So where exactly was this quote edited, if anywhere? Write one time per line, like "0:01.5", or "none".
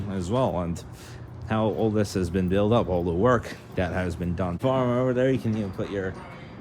0:04.6